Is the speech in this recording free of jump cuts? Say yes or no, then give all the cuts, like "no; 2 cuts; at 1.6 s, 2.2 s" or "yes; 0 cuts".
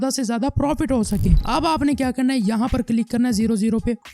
no; 1 cut; at 1.4 s